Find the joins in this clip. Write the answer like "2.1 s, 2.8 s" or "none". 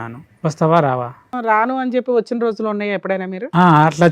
1.3 s

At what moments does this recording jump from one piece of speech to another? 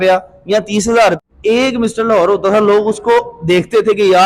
1.2 s

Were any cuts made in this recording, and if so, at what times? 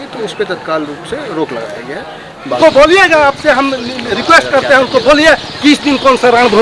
2.6 s

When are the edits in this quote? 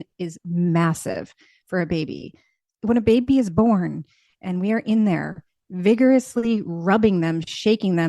2.6 s

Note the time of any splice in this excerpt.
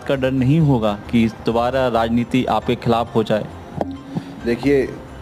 none

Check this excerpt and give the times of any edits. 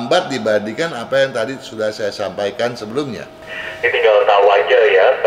none

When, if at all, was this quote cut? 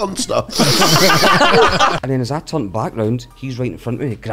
1.9 s, 3.4 s

